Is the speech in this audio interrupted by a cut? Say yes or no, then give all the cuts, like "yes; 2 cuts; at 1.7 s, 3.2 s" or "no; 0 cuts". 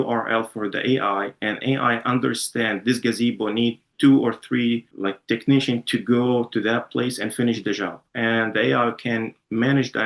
no; 0 cuts